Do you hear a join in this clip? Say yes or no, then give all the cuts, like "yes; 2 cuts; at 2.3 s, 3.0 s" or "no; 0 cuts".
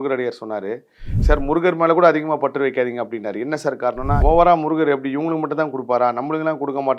yes; 2 cuts; at 1.2 s, 4.2 s